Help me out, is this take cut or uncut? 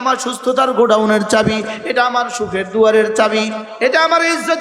cut